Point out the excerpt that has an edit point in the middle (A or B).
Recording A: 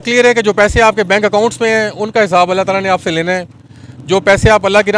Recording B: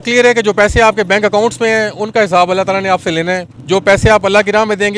B